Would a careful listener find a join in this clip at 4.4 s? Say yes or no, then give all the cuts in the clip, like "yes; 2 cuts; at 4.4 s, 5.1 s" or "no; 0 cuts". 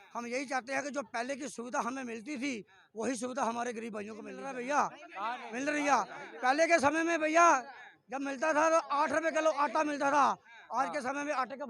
yes; 1 cut; at 4.4 s